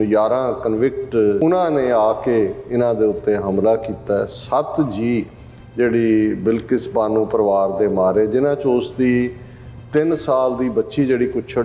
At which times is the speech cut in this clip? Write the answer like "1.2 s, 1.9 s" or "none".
1.4 s